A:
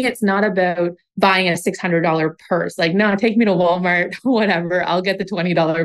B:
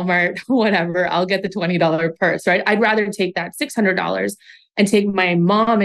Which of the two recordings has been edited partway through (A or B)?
A